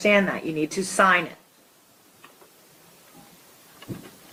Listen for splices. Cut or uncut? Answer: uncut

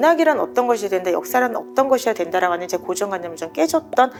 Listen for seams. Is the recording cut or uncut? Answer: uncut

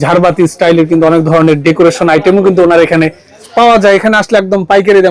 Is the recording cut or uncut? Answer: uncut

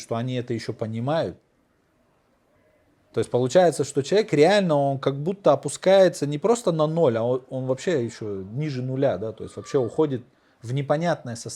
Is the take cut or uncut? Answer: uncut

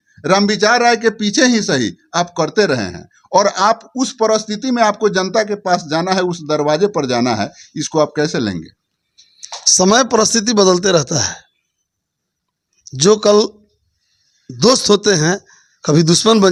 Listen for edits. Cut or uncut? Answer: uncut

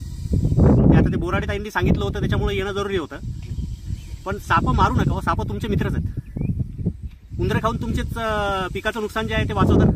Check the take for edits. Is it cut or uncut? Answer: uncut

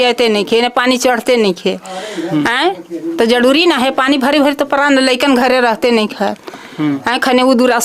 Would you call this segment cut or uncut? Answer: uncut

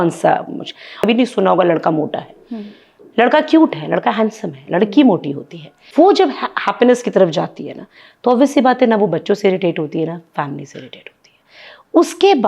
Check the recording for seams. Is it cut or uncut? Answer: cut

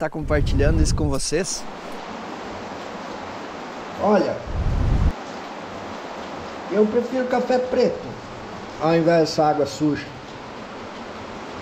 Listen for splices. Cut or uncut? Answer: cut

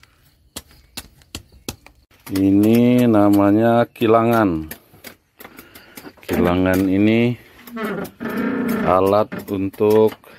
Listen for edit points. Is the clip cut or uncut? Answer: cut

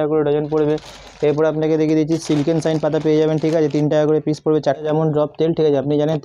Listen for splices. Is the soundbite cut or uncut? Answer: cut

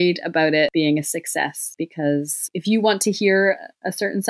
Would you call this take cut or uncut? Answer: cut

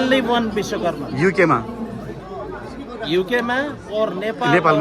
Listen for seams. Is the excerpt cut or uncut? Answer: uncut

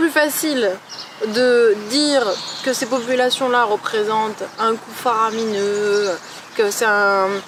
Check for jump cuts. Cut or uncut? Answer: uncut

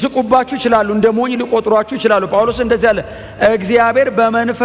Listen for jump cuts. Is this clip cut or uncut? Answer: uncut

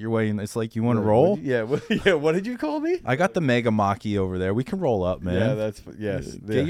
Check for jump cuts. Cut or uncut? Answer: cut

